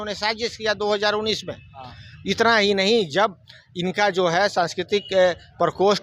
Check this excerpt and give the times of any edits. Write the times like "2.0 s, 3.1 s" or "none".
none